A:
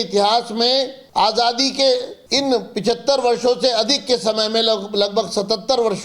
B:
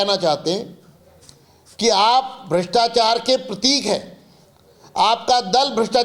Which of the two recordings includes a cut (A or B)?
A